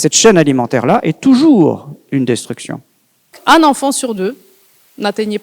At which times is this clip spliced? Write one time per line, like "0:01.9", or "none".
0:03.4